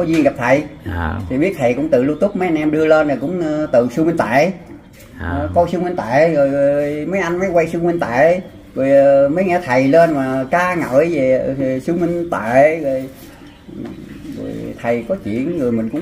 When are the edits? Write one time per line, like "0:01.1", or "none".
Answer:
none

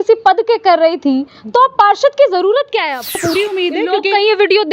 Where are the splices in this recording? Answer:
0:03.2

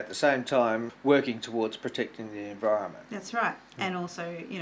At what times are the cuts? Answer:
0:00.9

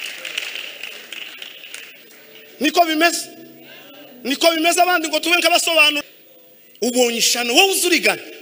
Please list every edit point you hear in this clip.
0:06.0

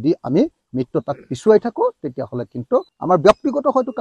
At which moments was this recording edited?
0:02.9

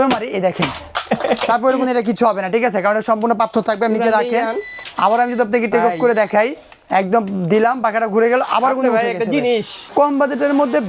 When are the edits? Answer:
0:09.9

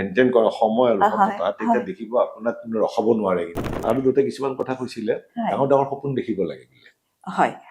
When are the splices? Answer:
0:03.8

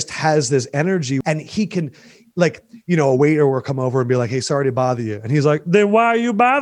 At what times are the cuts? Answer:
0:01.2

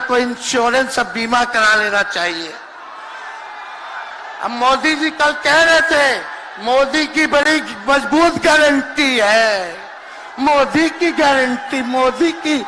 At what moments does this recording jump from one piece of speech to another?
none

